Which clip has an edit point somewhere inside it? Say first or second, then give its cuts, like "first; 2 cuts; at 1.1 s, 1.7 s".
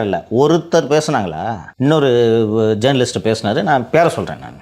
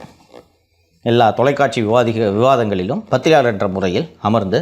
first; 1 cut; at 1.6 s